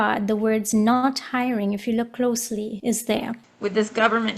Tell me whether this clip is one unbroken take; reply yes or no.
no